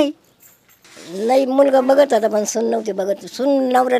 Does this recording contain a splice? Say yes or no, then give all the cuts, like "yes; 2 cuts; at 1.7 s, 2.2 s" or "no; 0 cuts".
yes; 1 cut; at 1.2 s